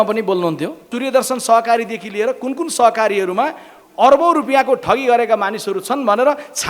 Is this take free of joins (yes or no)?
no